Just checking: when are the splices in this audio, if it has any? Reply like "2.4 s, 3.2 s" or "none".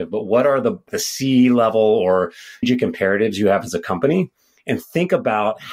0.9 s

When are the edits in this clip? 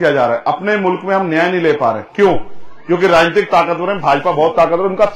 none

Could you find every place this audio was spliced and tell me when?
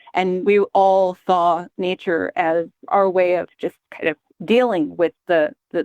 2.9 s, 4.3 s

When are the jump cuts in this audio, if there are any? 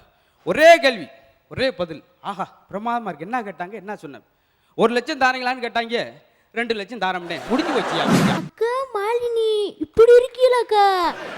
8.4 s

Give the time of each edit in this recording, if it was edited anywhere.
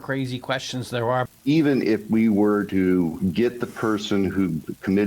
1.3 s, 2.8 s

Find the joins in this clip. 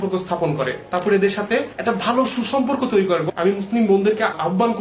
3.3 s

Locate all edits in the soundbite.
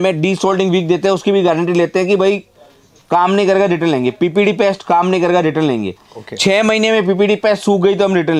none

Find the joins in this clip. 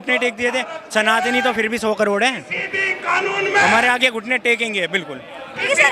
none

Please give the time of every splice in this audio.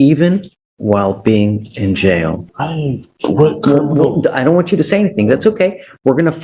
2.4 s

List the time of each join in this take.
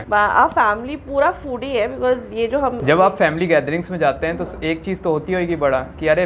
none

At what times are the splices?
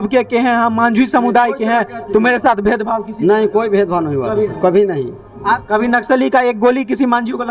5.6 s

